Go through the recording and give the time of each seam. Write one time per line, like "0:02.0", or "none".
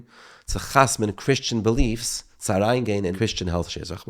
0:03.1